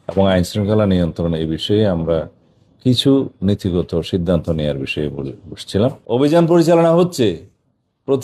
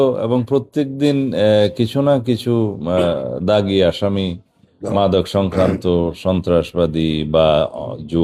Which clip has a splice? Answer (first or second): first